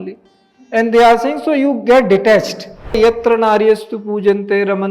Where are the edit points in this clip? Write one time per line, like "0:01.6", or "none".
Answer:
0:03.0